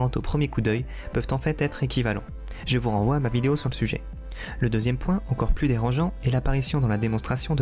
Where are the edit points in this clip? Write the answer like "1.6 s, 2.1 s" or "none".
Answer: none